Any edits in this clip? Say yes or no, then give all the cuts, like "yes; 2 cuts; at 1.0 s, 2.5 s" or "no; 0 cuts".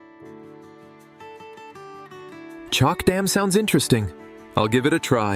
yes; 1 cut; at 2.7 s